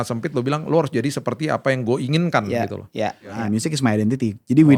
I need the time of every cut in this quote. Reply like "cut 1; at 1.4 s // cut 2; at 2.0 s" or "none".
cut 1; at 3.4 s

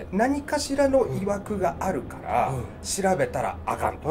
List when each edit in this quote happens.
none

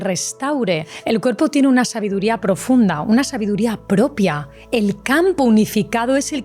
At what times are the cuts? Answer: cut 1; at 0.9 s // cut 2; at 4.5 s

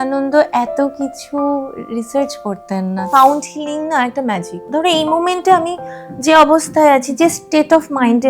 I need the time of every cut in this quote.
cut 1; at 3.1 s // cut 2; at 4.6 s

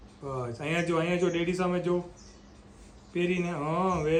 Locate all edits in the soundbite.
none

